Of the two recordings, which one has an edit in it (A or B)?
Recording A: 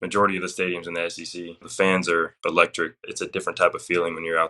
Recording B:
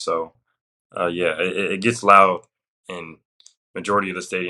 A